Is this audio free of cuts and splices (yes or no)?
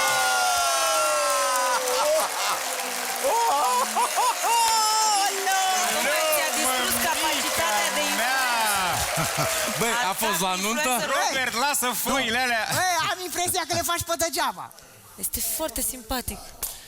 yes